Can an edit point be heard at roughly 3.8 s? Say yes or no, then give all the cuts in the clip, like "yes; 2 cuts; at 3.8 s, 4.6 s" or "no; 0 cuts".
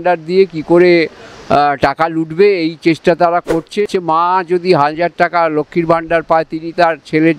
yes; 1 cut; at 3.8 s